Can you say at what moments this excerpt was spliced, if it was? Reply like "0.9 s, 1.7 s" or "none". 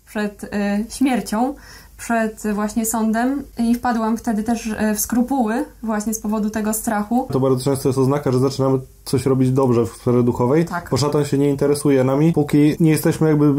3.5 s, 7.3 s, 12.6 s